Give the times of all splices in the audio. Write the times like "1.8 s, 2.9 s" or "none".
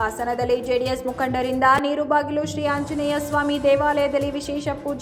none